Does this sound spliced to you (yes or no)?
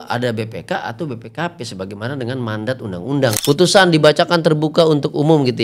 yes